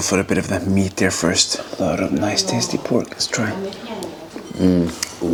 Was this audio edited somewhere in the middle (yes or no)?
no